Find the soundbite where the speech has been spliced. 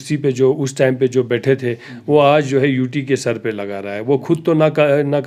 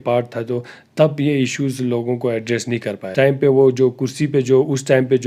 second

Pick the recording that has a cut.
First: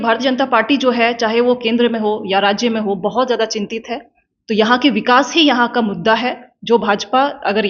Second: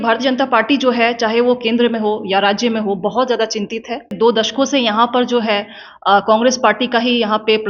second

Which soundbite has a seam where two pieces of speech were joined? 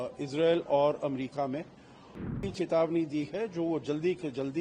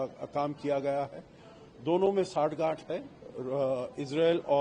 first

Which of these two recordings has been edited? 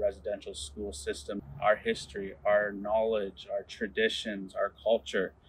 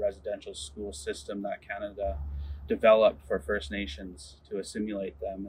first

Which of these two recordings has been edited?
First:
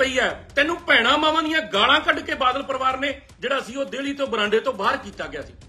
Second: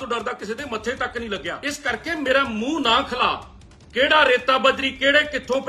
second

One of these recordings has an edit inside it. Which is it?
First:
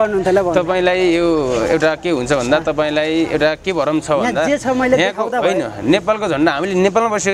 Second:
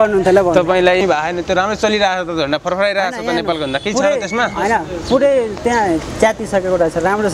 second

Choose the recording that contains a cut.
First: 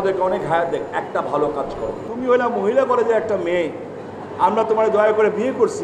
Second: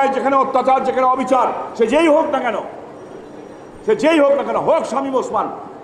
first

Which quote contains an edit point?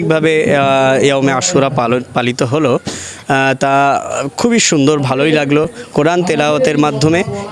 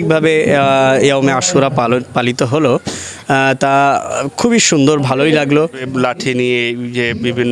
second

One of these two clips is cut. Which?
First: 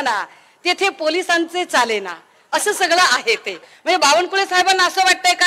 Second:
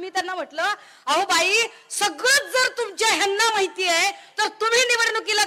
first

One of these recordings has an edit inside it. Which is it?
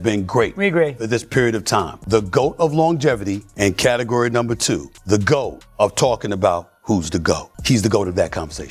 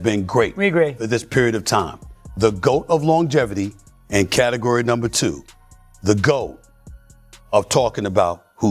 first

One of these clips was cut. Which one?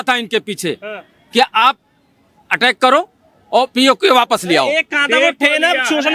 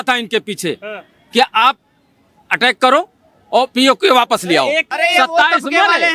second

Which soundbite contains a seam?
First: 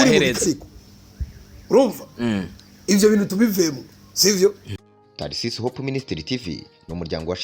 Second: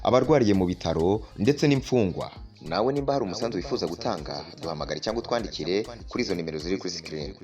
first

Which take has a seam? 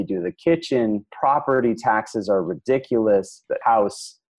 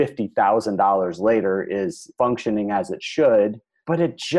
first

